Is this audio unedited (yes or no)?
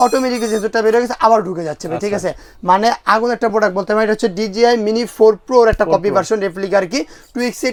yes